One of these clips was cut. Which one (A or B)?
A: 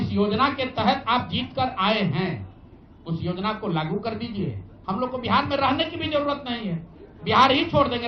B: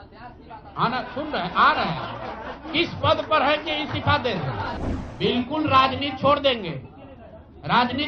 B